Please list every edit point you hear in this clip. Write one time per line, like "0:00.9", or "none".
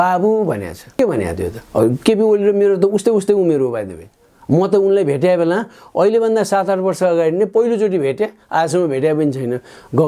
none